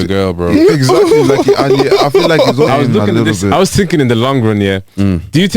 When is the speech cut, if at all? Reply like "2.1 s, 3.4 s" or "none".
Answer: 2.7 s